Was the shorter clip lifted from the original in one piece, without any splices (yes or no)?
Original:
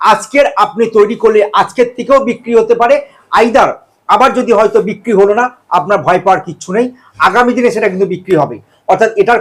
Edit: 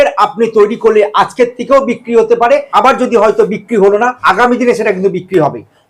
no